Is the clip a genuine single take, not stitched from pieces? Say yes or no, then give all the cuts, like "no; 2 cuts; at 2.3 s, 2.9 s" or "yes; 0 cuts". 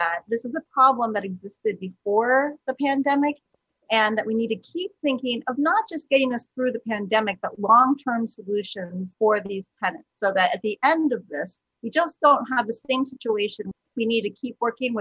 no; 1 cut; at 13.9 s